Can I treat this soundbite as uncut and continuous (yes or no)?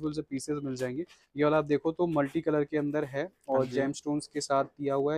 yes